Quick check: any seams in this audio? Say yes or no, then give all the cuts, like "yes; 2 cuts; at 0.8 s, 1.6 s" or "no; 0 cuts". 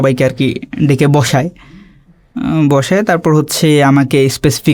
no; 0 cuts